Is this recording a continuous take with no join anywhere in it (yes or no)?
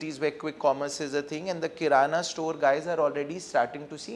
yes